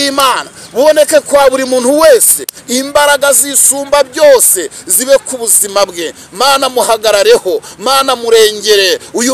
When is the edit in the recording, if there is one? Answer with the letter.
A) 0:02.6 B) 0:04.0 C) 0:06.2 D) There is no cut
A